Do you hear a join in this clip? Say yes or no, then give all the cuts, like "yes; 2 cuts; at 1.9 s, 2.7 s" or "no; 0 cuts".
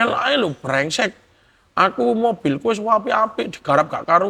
no; 0 cuts